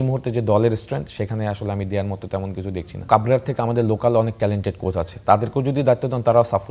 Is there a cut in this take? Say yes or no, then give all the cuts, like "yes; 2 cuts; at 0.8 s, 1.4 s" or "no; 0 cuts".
yes; 1 cut; at 3.0 s